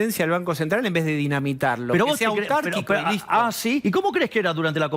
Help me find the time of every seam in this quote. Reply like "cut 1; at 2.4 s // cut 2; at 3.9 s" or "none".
cut 1; at 3.8 s